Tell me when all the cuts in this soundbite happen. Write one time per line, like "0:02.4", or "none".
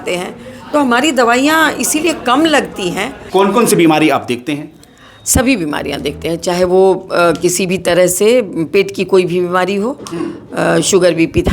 0:03.2

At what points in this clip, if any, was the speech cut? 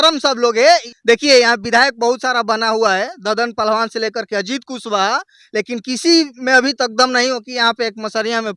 0:01.0

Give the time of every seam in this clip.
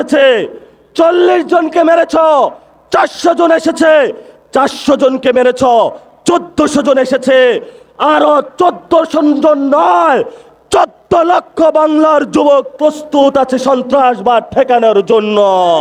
none

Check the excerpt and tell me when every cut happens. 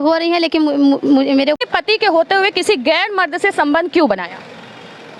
0:01.6

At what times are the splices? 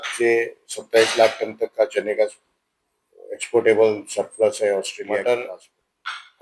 0:05.0

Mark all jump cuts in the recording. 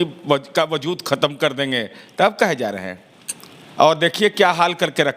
none

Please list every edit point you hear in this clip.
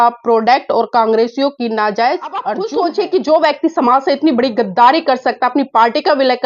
0:02.6

